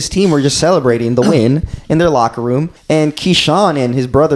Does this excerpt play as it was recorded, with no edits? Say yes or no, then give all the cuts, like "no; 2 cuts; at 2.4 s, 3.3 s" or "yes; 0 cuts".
no; 1 cut; at 2.7 s